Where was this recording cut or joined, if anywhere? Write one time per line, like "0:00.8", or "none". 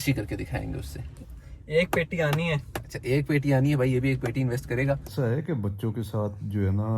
0:01.2
0:05.1

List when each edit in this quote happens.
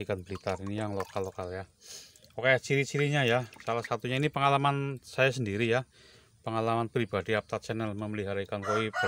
none

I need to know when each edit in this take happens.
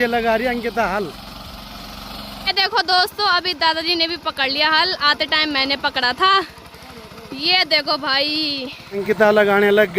none

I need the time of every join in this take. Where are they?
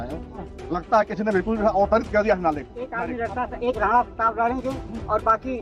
0:02.8

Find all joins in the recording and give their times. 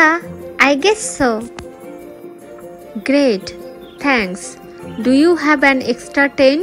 none

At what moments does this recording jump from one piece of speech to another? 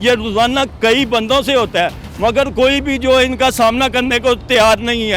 none

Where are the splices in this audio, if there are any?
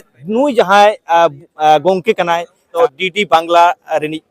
0:02.6

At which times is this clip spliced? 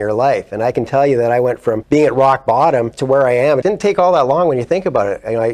0:01.8
0:03.3

